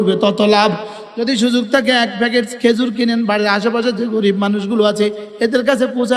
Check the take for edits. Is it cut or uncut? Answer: cut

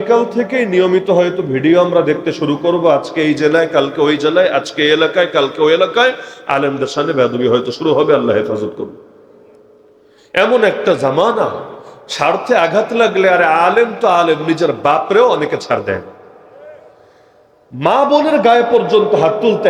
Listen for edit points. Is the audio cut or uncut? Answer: uncut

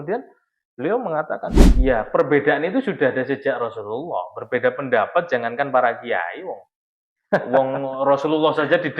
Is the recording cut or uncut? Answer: cut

